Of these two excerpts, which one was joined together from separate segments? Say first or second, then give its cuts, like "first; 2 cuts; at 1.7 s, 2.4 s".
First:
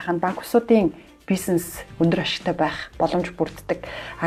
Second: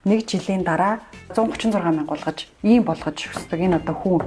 second; 1 cut; at 1.2 s